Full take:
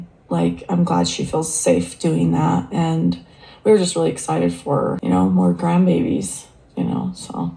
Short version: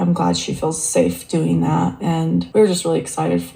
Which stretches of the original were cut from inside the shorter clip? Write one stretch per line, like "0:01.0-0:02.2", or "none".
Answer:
0:03.2-0:03.6